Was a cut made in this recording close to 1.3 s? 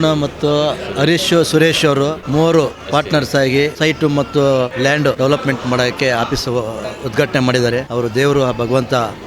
no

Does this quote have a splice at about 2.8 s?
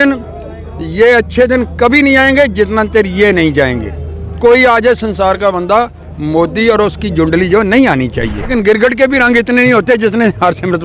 no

